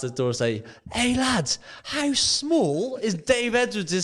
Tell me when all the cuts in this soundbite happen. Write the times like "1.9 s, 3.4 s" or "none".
none